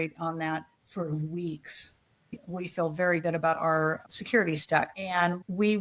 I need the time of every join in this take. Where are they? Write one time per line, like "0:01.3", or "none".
0:02.2